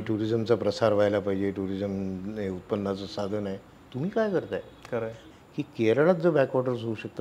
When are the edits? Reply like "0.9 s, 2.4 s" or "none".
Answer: 5.2 s